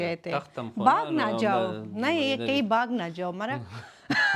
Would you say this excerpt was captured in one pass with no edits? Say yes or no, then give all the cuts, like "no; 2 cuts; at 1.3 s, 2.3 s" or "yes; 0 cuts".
yes; 0 cuts